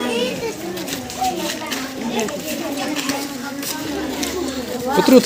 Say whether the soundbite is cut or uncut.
uncut